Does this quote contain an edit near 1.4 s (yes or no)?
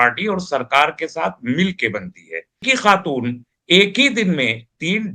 no